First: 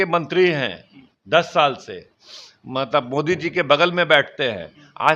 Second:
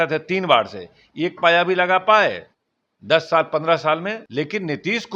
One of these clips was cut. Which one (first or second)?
second